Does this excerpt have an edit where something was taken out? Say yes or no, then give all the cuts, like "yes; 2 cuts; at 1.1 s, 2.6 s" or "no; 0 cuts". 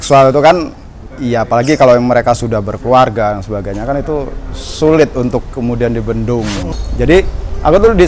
yes; 1 cut; at 6.8 s